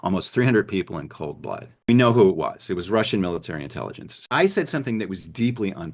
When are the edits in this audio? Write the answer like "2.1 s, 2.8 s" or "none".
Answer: 1.9 s, 4.1 s